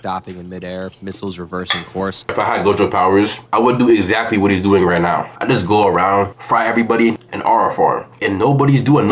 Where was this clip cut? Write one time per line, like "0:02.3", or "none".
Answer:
0:02.3
0:03.4
0:07.2